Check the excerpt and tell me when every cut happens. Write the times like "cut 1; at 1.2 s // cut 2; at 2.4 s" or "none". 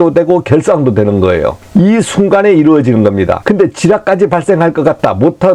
cut 1; at 1.6 s // cut 2; at 3.4 s